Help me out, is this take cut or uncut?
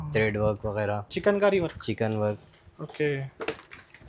uncut